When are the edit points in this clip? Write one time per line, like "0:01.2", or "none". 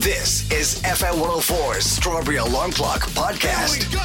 none

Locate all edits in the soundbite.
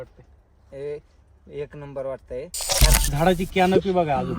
0:02.9

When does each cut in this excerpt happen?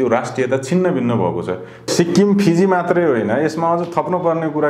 0:01.9

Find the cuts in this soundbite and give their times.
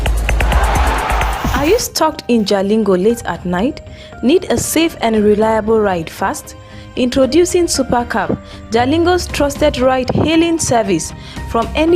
0:01.5

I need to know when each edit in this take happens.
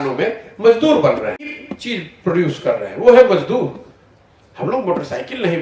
0:01.6

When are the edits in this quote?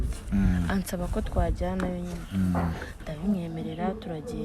none

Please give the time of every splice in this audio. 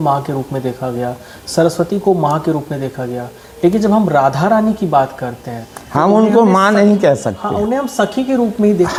none

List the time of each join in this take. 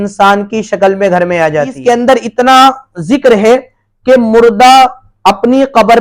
0:01.8

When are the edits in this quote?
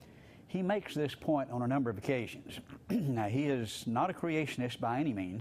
0:03.2

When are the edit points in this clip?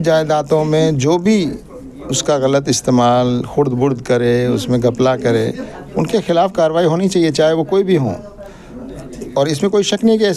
none

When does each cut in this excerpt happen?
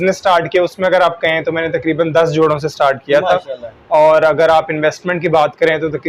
none

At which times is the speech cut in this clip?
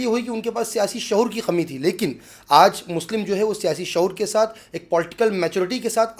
none

